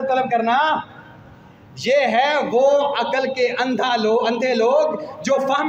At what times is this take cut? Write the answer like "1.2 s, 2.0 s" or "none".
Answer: none